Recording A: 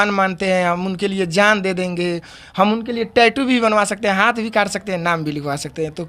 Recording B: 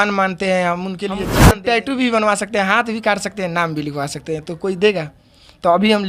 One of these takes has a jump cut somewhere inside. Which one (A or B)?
B